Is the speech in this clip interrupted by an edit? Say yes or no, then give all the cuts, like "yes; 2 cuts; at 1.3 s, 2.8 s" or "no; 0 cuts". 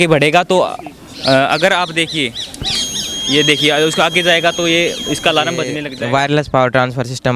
yes; 1 cut; at 5.8 s